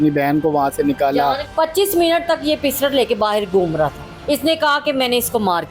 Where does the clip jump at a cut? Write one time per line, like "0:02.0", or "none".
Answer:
0:01.5
0:04.1